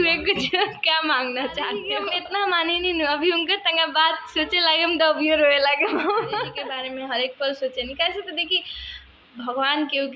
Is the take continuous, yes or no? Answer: no